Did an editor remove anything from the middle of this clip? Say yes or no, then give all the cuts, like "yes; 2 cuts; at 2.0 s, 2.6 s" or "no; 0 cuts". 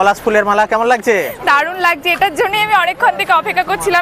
no; 0 cuts